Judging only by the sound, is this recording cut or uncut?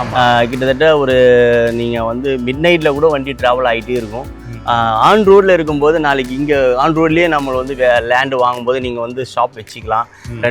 uncut